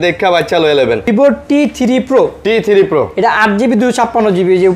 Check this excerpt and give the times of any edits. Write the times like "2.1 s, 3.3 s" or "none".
1.1 s